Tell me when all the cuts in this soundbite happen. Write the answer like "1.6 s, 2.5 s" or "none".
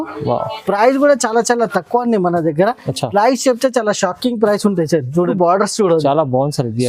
5.3 s